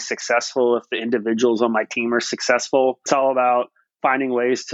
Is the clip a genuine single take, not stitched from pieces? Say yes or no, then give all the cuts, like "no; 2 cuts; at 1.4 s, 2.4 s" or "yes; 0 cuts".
no; 1 cut; at 3.1 s